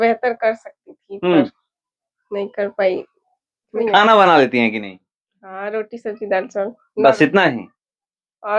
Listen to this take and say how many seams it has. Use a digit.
1